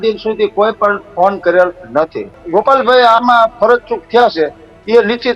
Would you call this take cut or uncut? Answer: cut